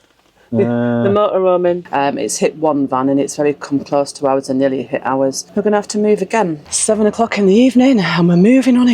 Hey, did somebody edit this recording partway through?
yes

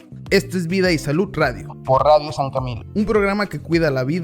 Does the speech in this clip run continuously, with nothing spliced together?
no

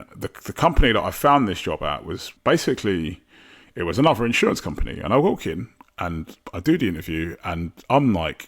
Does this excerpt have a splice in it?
yes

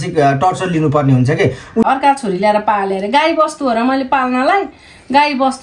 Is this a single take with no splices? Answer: no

